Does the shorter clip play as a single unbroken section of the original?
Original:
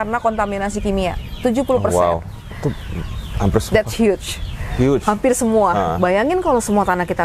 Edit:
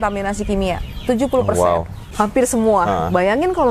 no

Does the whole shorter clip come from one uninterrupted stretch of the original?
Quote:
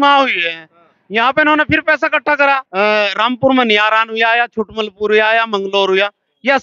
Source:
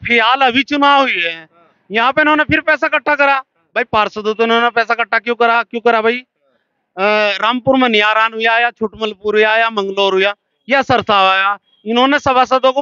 no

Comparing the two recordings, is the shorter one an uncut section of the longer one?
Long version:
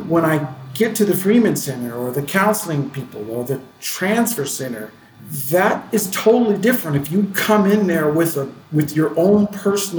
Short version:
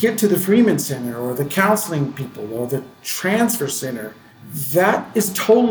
yes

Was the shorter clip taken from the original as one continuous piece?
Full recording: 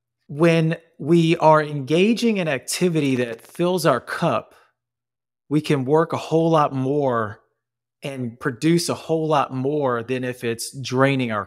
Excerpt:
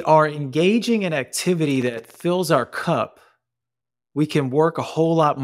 yes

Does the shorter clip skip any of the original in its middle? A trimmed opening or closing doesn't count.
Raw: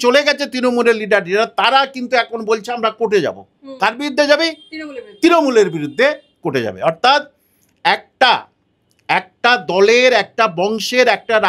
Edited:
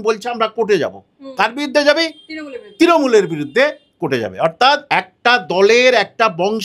yes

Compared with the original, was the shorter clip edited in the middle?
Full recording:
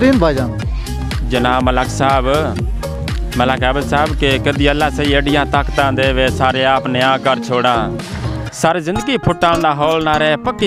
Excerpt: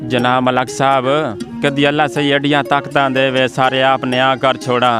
yes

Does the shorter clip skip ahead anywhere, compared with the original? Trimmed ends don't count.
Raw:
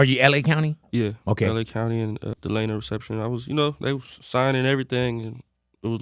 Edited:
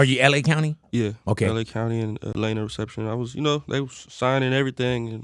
yes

